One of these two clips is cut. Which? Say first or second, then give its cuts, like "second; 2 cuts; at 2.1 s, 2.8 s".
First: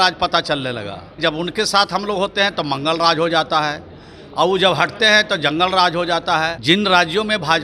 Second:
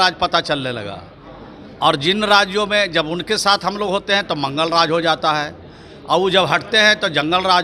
first; 2 cuts; at 1.2 s, 6.6 s